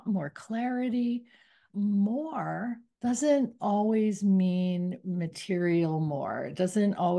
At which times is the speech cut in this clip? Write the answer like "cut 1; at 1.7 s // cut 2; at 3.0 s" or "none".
cut 1; at 1.7 s // cut 2; at 2.9 s